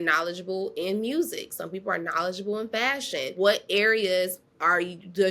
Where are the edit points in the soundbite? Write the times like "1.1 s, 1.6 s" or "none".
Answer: 3.3 s